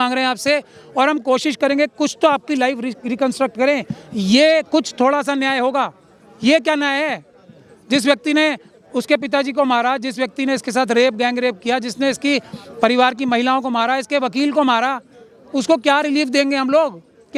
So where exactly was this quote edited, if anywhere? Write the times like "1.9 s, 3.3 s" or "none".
none